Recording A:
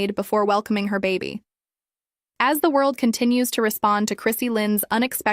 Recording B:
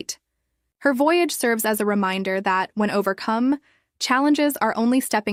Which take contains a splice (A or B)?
A